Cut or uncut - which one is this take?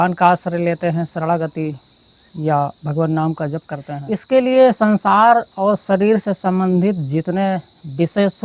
cut